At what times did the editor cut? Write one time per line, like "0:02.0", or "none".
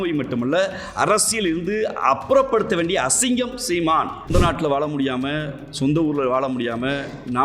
0:04.3